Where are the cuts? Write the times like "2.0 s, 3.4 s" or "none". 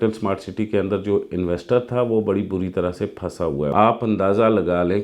3.7 s